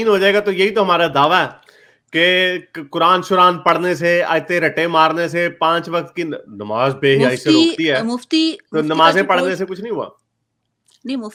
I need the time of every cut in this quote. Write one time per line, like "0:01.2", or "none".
none